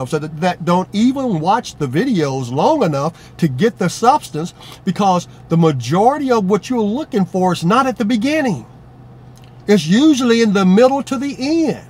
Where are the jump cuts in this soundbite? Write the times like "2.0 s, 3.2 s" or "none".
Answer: none